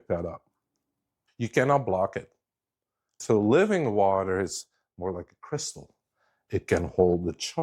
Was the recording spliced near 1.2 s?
yes; 2 cuts; at 1.2 s, 3.2 s

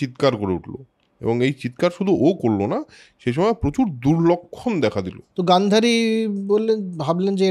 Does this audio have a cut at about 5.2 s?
yes; 1 cut; at 5.2 s

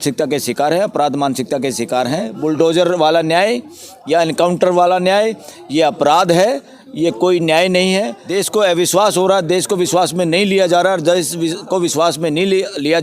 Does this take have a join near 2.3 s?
yes; 2 cuts; at 2.3 s, 8.2 s

